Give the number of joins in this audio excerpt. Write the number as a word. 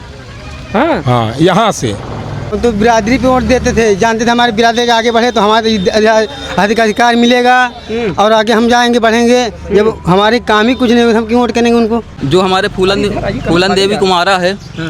two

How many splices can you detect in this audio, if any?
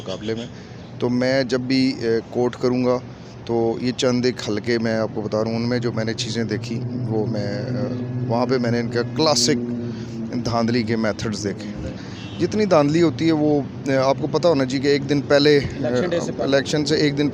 one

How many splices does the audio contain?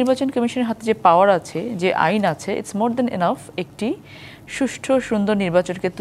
zero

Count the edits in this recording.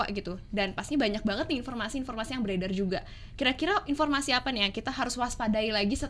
zero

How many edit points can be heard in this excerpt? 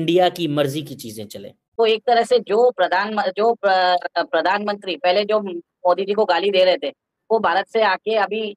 one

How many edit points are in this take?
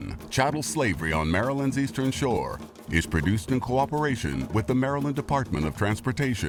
zero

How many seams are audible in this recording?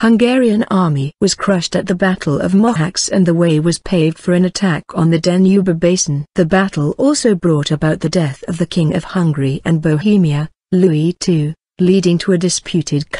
one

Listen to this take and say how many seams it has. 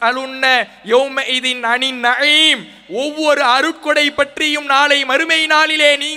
zero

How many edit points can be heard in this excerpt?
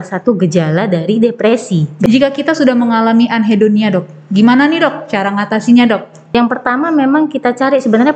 two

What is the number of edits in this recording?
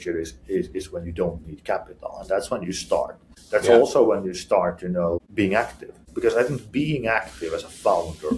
zero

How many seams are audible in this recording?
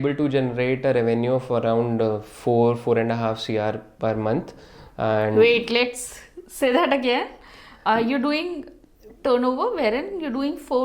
zero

